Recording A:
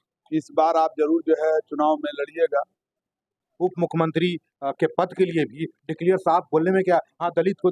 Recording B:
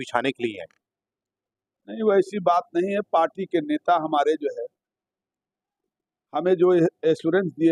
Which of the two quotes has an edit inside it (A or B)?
A